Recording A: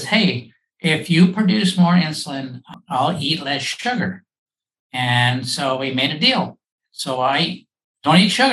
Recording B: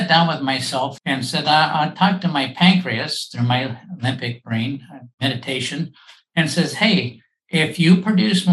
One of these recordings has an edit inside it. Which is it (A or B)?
B